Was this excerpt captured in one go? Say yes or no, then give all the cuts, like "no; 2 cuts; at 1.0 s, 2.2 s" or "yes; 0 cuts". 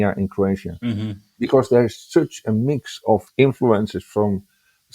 no; 1 cut; at 3.3 s